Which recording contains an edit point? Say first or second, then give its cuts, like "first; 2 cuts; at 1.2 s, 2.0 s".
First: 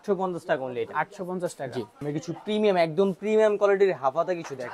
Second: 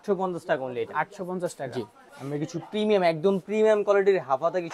first; 1 cut; at 1.9 s